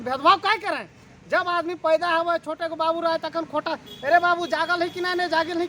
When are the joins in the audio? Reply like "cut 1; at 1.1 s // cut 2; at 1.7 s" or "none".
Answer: none